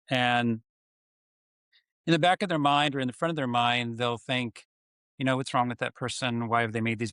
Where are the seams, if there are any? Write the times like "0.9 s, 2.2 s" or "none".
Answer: none